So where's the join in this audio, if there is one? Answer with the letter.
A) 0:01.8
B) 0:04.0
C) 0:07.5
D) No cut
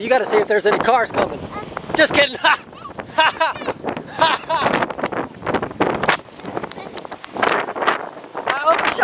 C